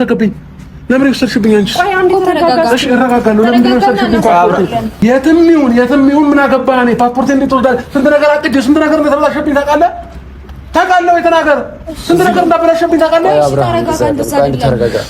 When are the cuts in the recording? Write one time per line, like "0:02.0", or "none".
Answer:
0:05.0